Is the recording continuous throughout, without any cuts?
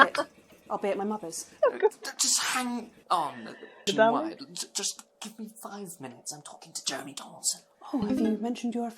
no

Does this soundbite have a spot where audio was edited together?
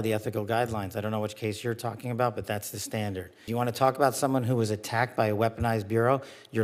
yes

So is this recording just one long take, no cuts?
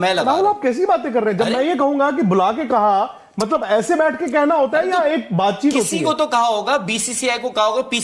yes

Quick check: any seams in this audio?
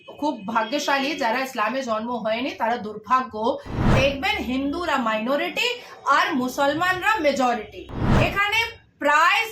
yes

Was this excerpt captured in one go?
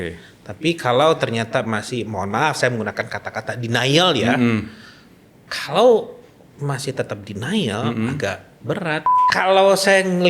no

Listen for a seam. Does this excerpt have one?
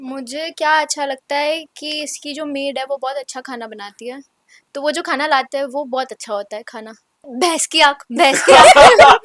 yes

